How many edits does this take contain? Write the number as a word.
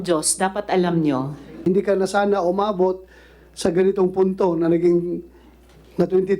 one